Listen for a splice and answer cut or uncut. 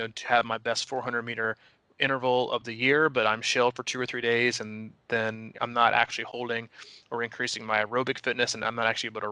cut